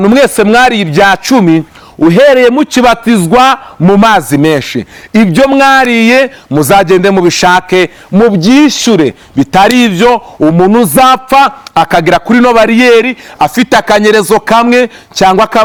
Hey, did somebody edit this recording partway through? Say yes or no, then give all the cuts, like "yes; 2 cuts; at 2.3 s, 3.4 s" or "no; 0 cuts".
no; 0 cuts